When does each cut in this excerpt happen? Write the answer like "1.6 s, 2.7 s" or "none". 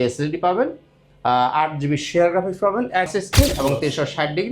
3.1 s

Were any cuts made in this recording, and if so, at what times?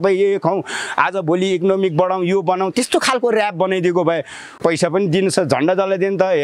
4.5 s

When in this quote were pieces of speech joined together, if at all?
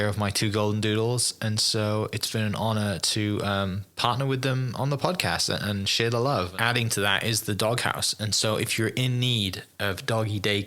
6.5 s

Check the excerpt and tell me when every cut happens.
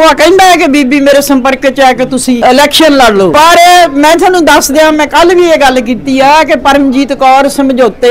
2.4 s, 3.3 s

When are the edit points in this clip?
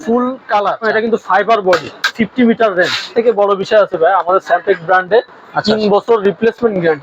0.9 s, 2.1 s, 3.1 s

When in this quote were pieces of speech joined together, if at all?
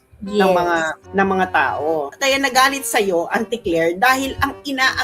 2.1 s

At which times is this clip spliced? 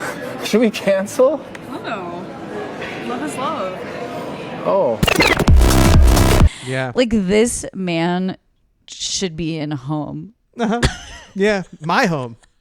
6.5 s

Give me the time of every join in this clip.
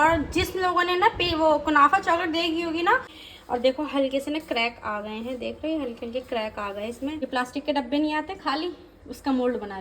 3.1 s, 7.3 s

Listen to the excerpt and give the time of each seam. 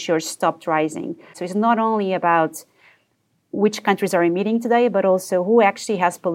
1.4 s, 3.6 s

